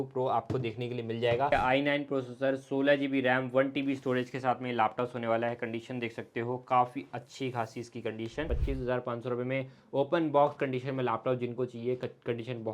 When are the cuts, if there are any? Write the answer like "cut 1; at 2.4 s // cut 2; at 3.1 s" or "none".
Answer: cut 1; at 1.5 s // cut 2; at 8.5 s